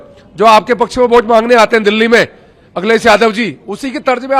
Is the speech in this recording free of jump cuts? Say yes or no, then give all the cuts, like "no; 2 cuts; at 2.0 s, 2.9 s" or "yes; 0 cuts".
yes; 0 cuts